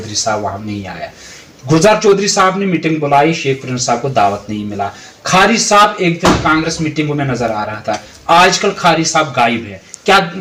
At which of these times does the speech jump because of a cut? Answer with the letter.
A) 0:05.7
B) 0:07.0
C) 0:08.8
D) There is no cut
D